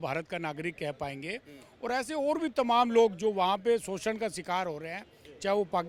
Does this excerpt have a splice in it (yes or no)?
no